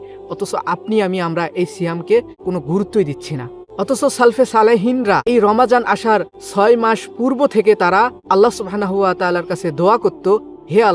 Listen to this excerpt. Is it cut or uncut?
cut